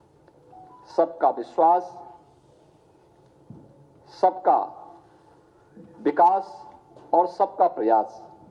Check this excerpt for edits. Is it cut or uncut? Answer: uncut